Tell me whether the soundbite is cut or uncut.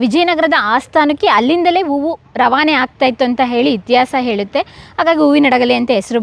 uncut